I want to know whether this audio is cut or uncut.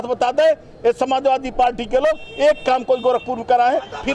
uncut